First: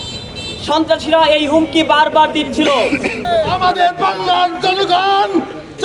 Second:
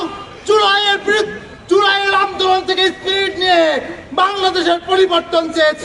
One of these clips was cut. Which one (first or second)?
first